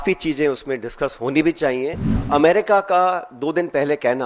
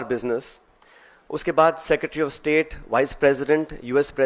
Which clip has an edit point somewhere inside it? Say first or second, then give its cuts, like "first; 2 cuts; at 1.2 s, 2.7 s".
first; 1 cut; at 2.1 s